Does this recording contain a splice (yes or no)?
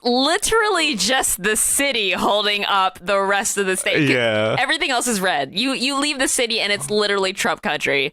no